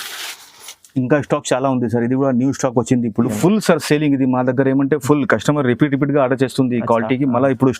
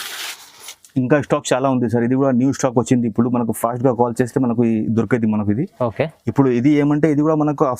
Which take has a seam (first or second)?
first